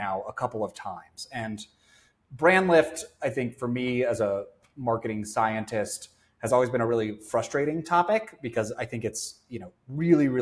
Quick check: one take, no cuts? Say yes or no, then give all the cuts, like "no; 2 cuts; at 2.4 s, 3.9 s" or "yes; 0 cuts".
yes; 0 cuts